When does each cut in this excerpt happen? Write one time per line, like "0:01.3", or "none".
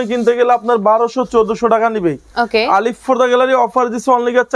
none